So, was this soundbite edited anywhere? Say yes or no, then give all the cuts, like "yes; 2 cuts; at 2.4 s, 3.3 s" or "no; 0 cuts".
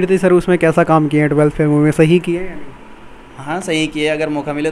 no; 0 cuts